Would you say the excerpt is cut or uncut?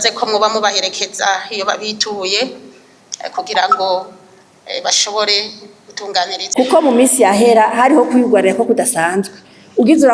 cut